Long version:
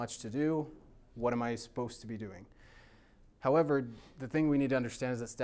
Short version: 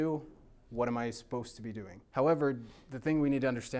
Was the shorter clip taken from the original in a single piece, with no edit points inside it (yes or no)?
no